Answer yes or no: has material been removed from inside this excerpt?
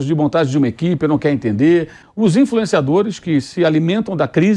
yes